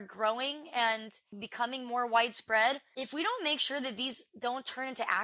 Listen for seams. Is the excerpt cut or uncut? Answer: cut